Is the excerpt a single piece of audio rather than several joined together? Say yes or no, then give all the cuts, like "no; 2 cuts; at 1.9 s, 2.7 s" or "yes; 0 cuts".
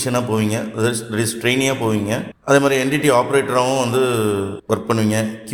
yes; 0 cuts